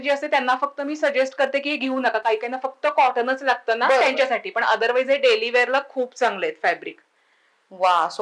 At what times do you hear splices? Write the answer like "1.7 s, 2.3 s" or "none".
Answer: none